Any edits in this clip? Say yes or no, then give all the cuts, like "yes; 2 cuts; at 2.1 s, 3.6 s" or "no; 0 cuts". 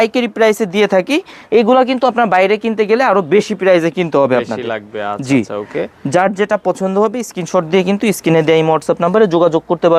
no; 0 cuts